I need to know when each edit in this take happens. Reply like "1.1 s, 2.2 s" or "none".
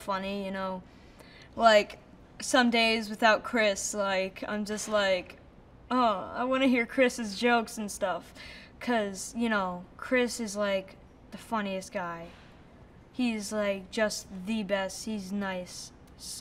8.7 s

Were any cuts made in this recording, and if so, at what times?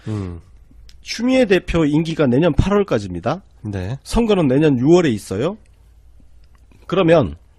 4.5 s

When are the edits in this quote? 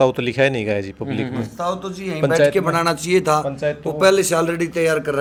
none

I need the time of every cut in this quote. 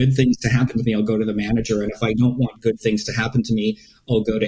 none

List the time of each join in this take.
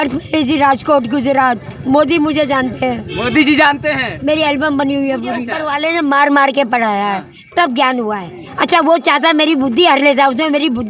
1.7 s, 5.6 s

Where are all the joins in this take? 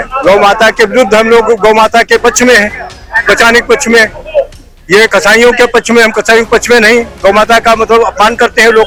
none

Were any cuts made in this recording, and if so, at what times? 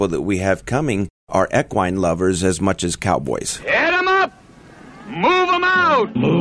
3.5 s

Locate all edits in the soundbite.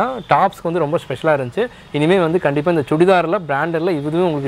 none

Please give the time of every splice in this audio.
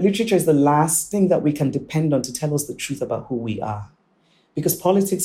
1.1 s

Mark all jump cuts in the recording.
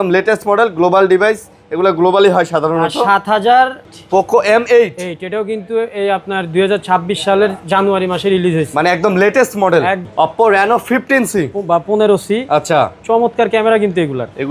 3.9 s, 10.0 s

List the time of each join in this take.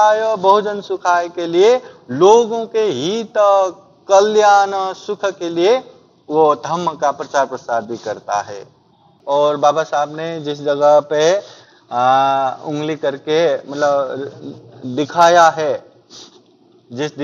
9.2 s

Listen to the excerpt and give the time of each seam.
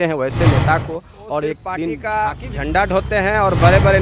2.0 s

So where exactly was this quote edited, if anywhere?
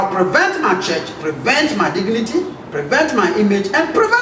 2.6 s

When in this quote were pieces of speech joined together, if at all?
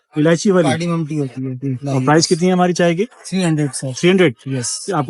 1.8 s

